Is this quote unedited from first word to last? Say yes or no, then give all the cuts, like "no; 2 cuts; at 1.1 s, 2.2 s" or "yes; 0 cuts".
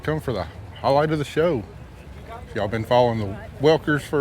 yes; 0 cuts